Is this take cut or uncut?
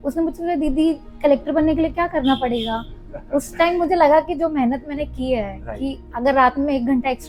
uncut